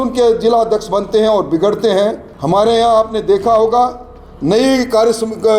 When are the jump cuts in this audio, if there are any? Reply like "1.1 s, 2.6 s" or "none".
2.3 s